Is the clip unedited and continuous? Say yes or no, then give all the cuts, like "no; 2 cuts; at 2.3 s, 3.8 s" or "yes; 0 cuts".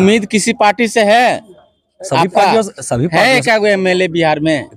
yes; 0 cuts